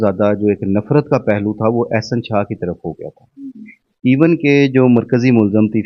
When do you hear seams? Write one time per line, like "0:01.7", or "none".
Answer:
none